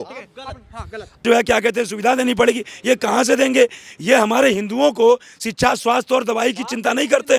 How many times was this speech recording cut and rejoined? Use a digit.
1